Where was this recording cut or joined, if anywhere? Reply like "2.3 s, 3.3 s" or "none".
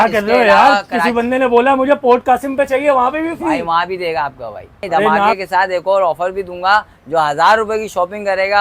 5.4 s